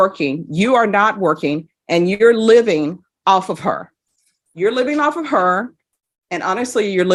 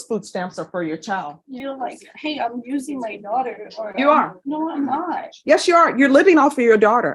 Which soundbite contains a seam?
second; 1 cut; at 1.6 s

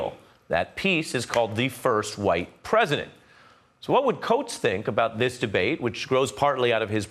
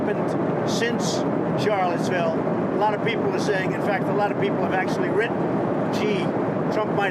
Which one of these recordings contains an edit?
second; 1 cut; at 4.7 s

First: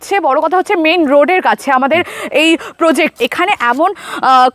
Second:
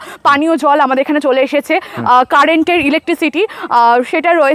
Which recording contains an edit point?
first; 1 cut; at 3.2 s

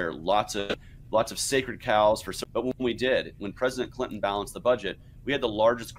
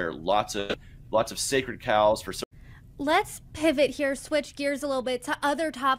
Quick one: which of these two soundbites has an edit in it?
second; 1 cut; at 2.4 s

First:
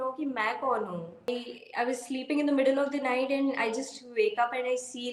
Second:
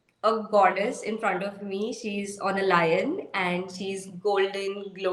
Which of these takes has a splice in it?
first; 1 cut; at 1.3 s

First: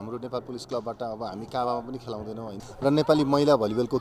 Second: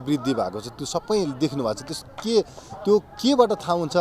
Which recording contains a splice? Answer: first; 1 cut; at 2.7 s

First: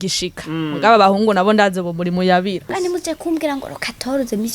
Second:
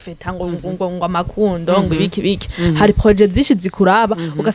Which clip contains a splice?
first; 1 cut; at 2.7 s

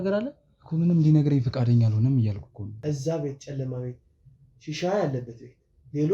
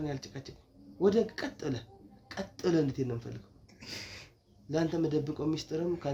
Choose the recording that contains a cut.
first; 1 cut; at 2.6 s

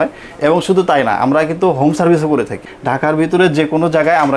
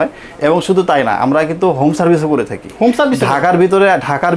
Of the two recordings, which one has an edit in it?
first; 1 cut; at 2.6 s

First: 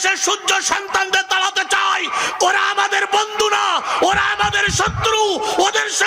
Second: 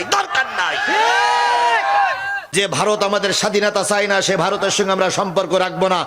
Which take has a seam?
second; 1 cut; at 2.5 s

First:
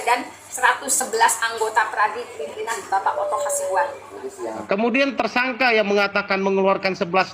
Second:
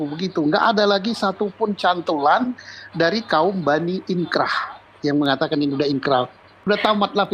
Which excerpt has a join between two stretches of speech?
first; 1 cut; at 4.6 s

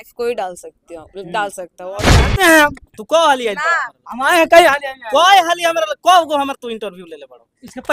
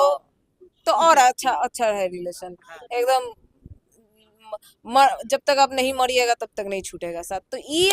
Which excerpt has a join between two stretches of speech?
first; 1 cut; at 2.2 s

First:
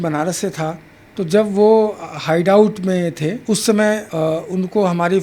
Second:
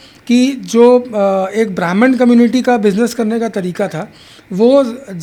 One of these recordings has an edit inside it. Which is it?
first; 2 cuts; at 3.4 s, 4.1 s

